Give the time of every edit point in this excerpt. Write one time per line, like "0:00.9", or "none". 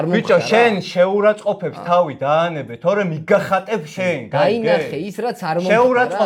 none